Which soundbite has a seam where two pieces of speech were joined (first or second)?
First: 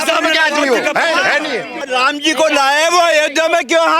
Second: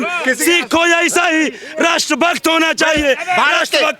first